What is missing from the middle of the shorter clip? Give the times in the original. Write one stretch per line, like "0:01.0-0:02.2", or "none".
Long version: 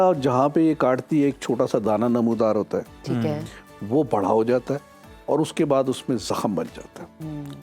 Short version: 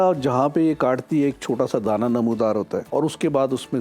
0:02.9-0:05.2